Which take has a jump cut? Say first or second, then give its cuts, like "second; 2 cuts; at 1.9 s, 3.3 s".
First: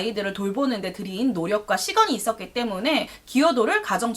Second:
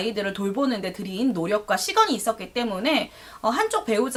first; 1 cut; at 3.2 s